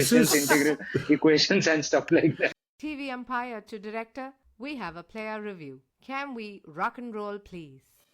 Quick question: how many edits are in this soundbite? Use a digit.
1